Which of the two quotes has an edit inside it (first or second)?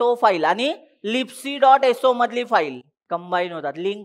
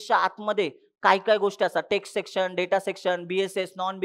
first